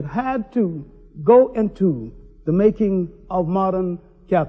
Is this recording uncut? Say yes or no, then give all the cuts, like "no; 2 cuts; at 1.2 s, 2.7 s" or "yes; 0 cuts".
yes; 0 cuts